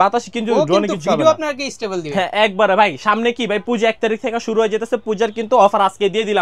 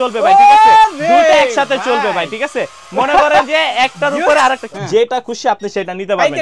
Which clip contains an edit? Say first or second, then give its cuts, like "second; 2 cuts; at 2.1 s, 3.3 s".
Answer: second; 1 cut; at 4.6 s